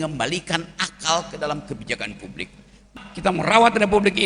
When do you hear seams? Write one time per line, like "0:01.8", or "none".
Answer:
0:02.9